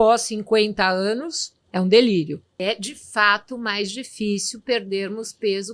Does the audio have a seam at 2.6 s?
yes; 1 cut; at 2.6 s

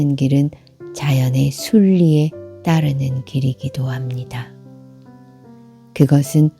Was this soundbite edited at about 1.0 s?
no; 2 cuts; at 4.4 s, 5.9 s

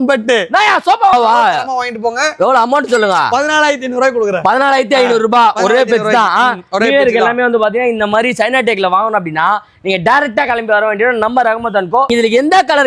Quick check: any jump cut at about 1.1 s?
yes; 2 cuts; at 1.1 s, 12.1 s

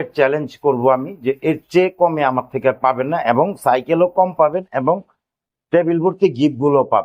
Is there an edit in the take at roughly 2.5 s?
no; 0 cuts

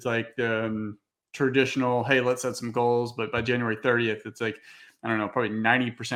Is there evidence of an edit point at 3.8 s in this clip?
no; 0 cuts

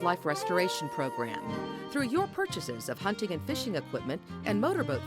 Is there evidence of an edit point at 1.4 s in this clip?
yes; 1 cut; at 1.4 s

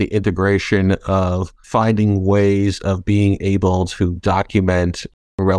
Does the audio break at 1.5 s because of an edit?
yes; 1 cut; at 1.5 s

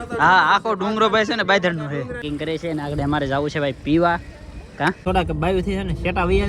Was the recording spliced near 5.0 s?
yes; 2 cuts; at 2.2 s, 5.0 s

